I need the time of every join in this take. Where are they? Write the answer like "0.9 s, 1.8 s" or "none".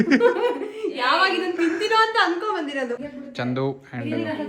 3.1 s